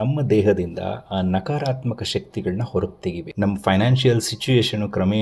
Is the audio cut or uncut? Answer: cut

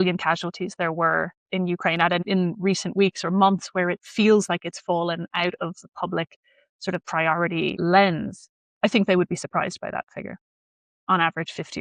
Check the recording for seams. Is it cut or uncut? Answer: uncut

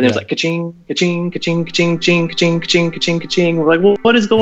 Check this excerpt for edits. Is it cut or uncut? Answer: uncut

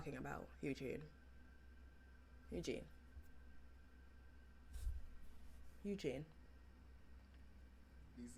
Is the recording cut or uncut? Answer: uncut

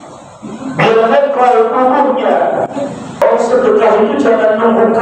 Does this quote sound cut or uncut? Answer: cut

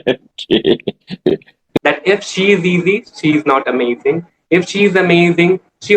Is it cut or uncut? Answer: cut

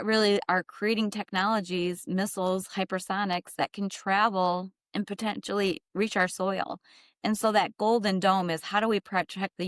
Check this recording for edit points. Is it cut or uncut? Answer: uncut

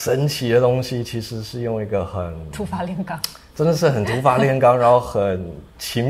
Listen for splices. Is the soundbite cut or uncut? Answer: uncut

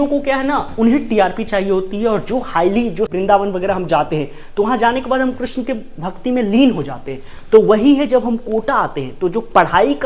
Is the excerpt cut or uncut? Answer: cut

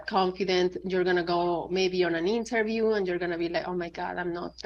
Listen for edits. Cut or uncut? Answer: uncut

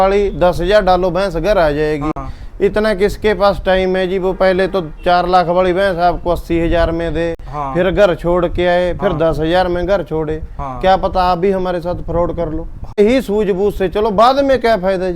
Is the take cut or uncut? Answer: cut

